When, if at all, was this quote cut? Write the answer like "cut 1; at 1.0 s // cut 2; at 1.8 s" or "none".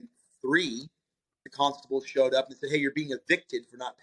cut 1; at 1.4 s